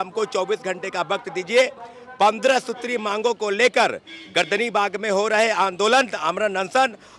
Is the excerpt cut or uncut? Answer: uncut